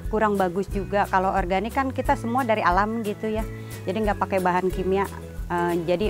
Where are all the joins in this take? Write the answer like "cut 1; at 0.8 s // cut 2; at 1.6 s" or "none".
cut 1; at 1.1 s